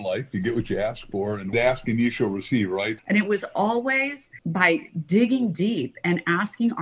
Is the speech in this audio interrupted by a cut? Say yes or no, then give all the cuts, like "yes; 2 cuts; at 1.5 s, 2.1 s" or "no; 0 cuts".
yes; 3 cuts; at 1.5 s, 3.0 s, 4.3 s